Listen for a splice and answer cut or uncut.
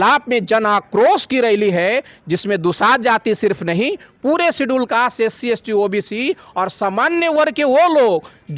uncut